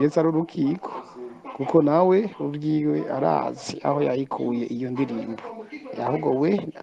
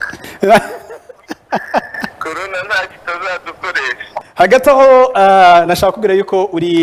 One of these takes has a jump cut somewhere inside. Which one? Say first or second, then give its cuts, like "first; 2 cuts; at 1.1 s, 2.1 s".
second; 1 cut; at 4.2 s